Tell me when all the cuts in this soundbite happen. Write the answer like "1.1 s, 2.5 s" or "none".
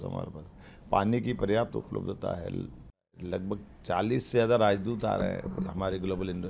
3.2 s